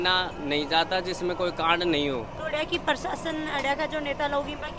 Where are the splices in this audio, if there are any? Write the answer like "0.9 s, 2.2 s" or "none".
none